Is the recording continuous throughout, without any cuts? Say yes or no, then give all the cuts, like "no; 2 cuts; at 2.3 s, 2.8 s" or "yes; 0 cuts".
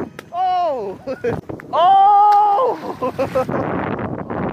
no; 1 cut; at 1.4 s